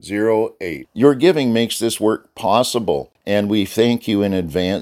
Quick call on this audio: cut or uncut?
cut